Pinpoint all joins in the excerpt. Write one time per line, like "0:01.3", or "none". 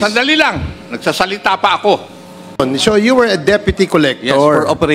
0:02.5